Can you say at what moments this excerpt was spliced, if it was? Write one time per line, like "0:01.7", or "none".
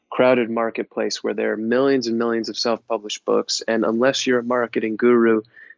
none